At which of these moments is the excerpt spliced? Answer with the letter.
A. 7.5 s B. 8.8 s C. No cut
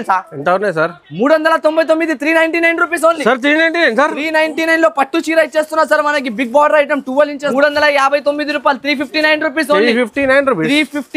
A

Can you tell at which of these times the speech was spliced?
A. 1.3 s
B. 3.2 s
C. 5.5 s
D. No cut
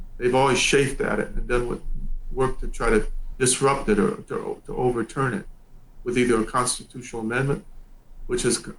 B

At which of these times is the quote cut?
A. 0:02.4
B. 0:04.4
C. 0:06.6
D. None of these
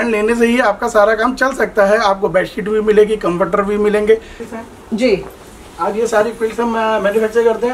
B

